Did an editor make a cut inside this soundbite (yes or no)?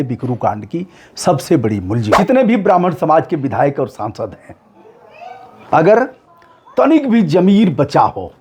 yes